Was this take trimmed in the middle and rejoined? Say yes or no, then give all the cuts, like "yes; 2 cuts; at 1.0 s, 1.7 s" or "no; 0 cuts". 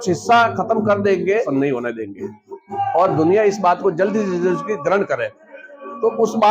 yes; 2 cuts; at 1.5 s, 2.8 s